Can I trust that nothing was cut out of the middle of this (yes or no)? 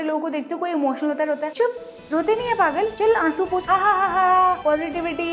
yes